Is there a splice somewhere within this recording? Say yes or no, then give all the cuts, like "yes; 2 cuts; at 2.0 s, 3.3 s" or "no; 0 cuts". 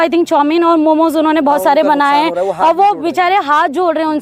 no; 0 cuts